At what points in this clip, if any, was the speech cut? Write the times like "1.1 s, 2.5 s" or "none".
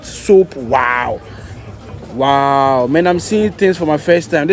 none